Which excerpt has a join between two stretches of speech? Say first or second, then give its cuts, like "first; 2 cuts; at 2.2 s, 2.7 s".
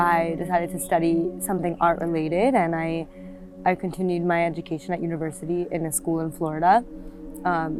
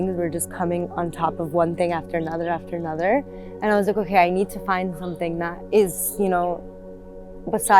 second; 2 cuts; at 3.4 s, 5.6 s